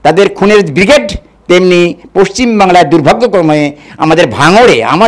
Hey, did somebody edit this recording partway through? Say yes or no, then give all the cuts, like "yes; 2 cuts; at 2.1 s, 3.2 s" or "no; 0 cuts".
no; 0 cuts